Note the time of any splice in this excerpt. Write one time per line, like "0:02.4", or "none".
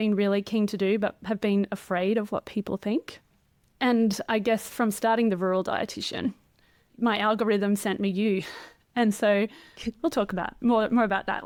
none